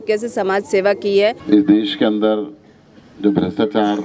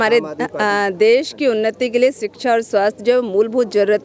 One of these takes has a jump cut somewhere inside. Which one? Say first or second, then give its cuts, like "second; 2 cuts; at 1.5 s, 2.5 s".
first; 1 cut; at 1.4 s